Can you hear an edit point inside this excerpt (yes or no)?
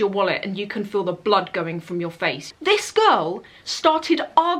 yes